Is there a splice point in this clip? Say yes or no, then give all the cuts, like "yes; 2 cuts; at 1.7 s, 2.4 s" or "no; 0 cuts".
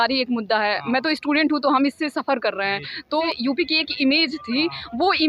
yes; 1 cut; at 3.2 s